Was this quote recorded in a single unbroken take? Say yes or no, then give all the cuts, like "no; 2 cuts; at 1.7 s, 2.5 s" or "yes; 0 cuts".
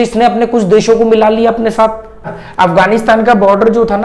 no; 1 cut; at 2.2 s